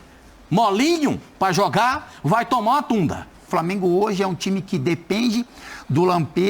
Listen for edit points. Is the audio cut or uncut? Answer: cut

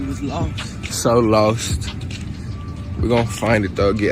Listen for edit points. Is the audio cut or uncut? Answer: uncut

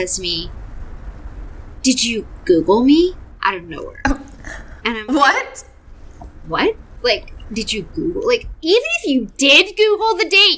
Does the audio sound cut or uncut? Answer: uncut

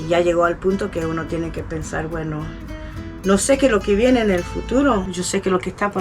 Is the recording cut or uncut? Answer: cut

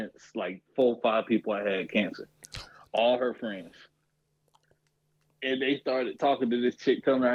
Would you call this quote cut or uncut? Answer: uncut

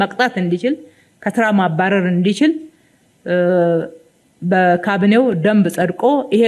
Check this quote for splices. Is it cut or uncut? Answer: uncut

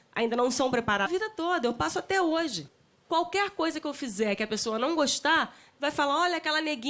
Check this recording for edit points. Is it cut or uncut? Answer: uncut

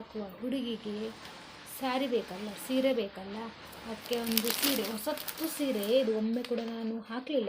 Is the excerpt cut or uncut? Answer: uncut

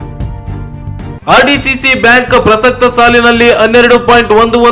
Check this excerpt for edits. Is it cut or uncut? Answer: uncut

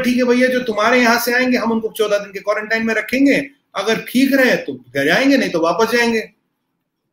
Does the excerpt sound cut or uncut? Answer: uncut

